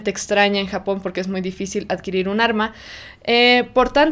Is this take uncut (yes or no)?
yes